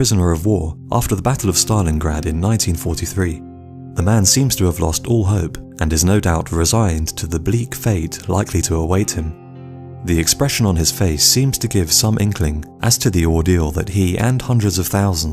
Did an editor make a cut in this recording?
yes; 1 cut; at 3.5 s

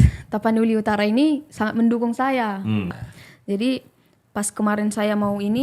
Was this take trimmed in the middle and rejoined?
yes; 1 cut; at 3.0 s

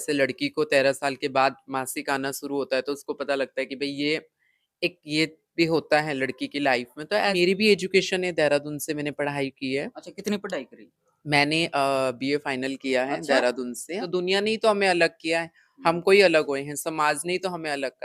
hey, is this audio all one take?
no; 2 cuts; at 7.3 s, 14.0 s

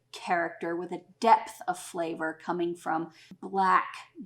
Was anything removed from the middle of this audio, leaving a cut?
yes; 1 cut; at 3.3 s

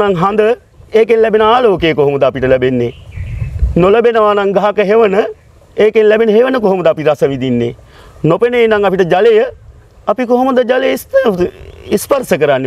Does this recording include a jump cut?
no; 0 cuts

